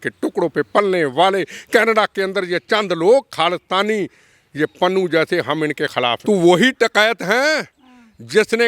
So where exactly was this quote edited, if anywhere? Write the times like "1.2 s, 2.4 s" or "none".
6.2 s